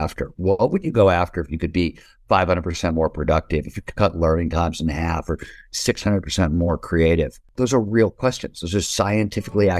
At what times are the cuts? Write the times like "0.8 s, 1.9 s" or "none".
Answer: 7.5 s